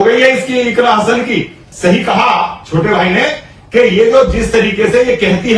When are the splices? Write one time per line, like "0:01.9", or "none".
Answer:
0:01.6